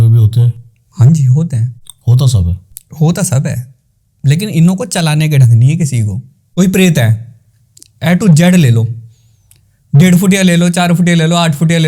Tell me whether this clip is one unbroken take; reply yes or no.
no